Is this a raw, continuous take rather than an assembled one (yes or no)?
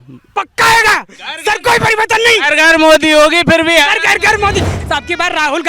no